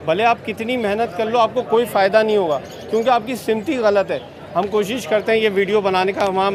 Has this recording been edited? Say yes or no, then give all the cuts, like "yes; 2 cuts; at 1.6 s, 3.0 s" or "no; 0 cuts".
no; 0 cuts